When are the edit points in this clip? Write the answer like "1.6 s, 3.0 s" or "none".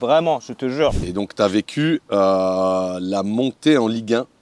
1.0 s